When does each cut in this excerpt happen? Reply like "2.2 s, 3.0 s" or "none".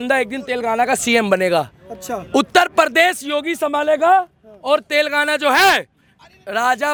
none